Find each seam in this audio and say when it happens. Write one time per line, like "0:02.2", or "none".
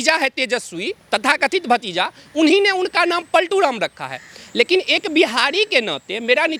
none